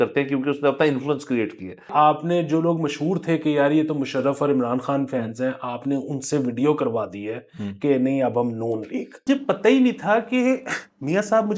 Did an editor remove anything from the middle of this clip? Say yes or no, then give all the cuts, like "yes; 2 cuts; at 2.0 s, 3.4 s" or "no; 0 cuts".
yes; 2 cuts; at 1.9 s, 9.3 s